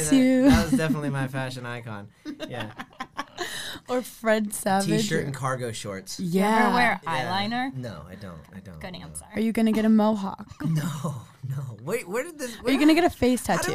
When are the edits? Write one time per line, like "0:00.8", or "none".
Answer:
0:07.8